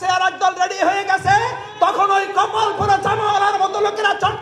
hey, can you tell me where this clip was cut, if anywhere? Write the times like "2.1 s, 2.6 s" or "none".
none